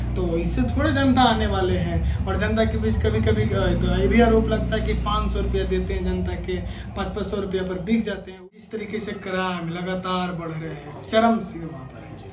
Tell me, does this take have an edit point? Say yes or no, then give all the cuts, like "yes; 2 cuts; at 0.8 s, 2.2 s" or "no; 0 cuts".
yes; 1 cut; at 8.4 s